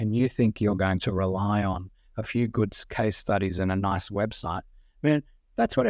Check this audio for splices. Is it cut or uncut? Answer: uncut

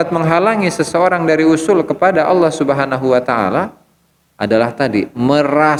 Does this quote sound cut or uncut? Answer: uncut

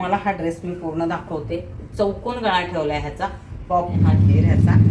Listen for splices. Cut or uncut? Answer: cut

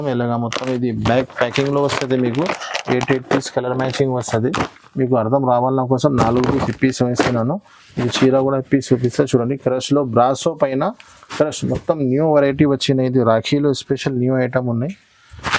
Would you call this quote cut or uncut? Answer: uncut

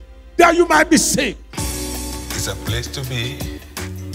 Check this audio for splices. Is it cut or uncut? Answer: cut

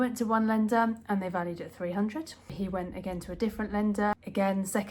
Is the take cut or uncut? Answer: cut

